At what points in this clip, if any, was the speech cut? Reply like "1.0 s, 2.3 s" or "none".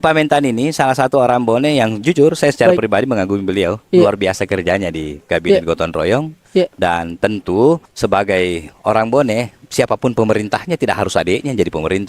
7.9 s

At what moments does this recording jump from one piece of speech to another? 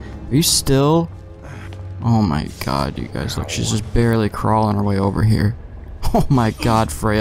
none

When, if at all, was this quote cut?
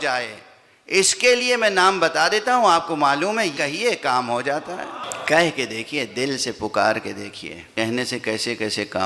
3.5 s, 5.1 s, 7.7 s

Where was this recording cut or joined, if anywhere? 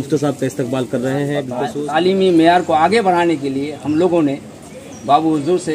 1.6 s

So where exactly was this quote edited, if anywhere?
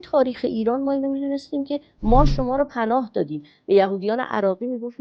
none

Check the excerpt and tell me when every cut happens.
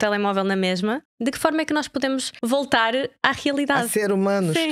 1.1 s, 2.3 s

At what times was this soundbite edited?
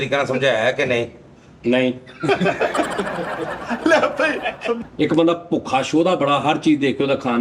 4.8 s

